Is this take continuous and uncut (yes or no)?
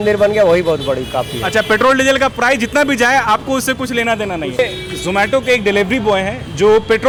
yes